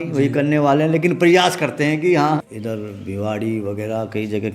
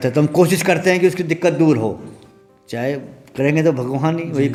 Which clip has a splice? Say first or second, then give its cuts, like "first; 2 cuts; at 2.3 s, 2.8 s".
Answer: first; 1 cut; at 2.5 s